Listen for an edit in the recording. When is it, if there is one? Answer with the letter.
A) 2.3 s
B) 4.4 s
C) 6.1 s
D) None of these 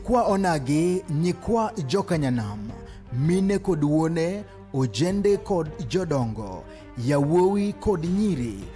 C